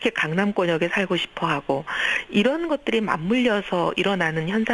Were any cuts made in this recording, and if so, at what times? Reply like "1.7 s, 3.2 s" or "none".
3.4 s